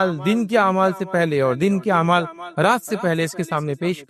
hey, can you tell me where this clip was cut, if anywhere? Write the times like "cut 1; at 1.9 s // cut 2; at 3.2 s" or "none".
none